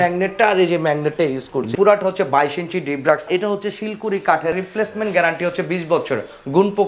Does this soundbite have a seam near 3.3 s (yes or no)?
yes